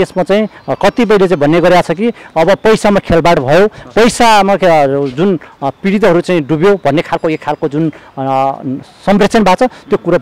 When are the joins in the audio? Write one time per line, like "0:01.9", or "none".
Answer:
none